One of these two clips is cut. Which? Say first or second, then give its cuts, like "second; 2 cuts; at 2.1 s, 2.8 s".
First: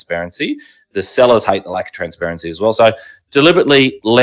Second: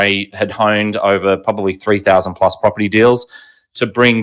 first; 1 cut; at 2.8 s